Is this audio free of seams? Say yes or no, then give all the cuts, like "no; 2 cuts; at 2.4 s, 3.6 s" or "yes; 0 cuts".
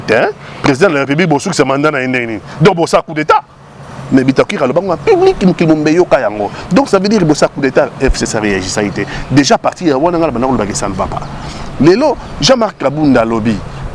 yes; 0 cuts